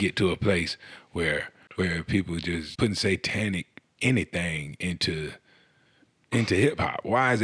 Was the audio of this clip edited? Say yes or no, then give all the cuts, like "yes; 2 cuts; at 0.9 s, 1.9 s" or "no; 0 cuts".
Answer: yes; 2 cuts; at 1.6 s, 2.7 s